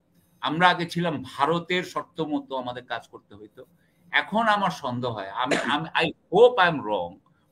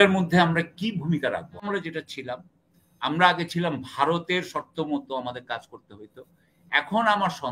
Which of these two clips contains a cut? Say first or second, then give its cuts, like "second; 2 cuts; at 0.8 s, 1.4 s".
second; 1 cut; at 1.6 s